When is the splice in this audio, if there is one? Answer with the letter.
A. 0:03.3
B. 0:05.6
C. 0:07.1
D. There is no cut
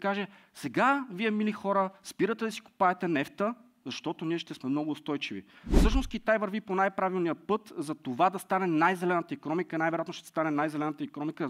B